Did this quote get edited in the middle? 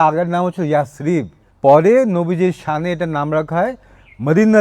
yes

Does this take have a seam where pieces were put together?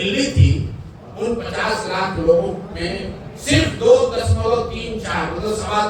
no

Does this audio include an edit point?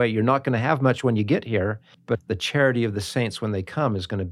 yes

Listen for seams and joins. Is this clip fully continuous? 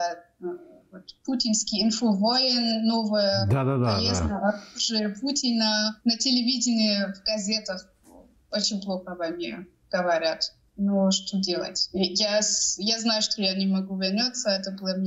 yes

